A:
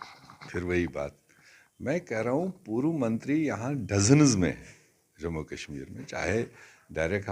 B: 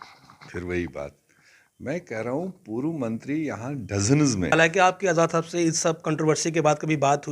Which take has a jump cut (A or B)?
B